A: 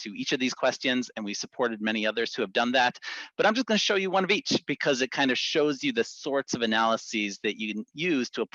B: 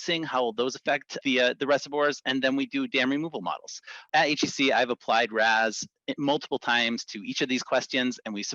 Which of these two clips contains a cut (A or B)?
B